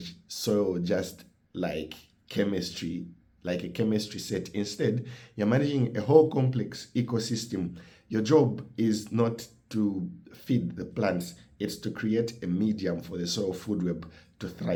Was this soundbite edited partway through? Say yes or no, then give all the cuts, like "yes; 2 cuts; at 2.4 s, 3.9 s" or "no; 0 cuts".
no; 0 cuts